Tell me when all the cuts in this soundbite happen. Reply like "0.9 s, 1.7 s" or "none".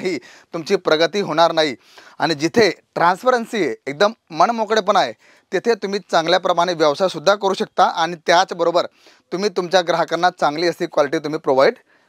none